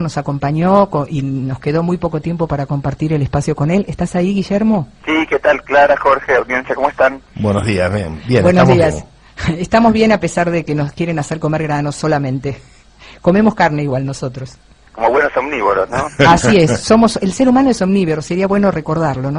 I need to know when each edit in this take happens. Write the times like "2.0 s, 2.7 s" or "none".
12.2 s

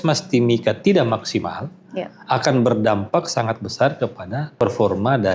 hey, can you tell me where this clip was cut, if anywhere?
4.4 s

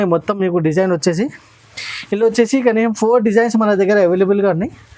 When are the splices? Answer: none

